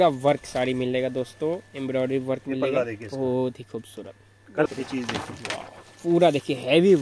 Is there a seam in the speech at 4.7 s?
yes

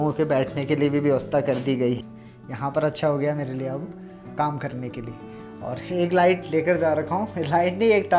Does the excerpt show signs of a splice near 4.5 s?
no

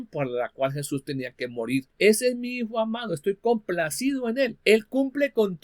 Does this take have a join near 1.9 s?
yes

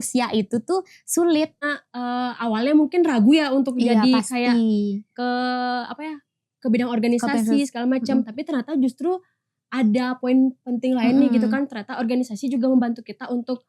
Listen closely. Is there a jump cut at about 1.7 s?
yes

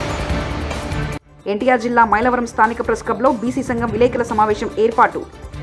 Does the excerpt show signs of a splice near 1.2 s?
yes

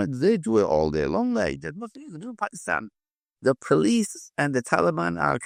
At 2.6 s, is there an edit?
no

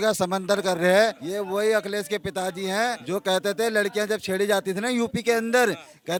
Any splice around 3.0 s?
no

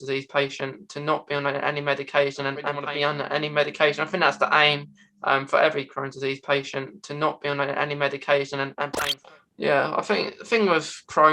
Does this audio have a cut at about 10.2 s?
no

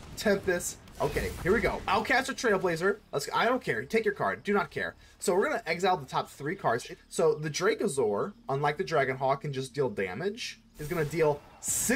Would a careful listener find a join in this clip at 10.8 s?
yes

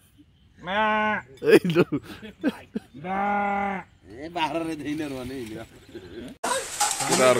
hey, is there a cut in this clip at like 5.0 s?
no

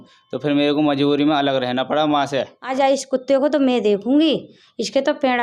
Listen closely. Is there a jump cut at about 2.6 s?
yes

